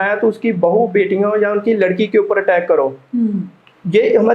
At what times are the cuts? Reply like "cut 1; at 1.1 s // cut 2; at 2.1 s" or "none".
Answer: none